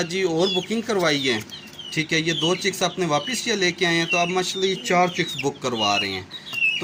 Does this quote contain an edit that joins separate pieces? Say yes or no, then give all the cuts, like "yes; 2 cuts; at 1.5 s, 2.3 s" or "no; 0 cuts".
no; 0 cuts